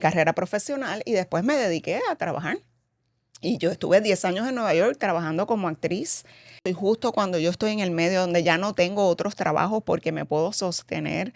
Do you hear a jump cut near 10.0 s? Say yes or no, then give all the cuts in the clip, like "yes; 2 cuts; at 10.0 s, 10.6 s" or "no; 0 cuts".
no; 1 cut; at 6.6 s